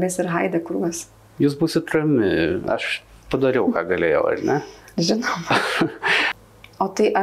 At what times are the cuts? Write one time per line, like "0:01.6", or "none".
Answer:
0:01.3
0:06.3